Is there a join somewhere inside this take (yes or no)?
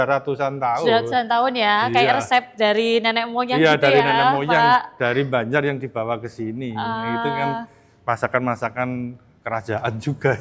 no